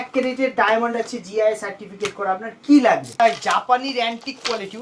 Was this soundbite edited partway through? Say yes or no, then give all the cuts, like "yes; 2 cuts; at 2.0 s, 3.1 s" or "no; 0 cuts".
yes; 1 cut; at 3.1 s